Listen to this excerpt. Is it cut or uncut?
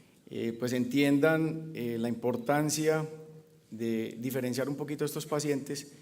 cut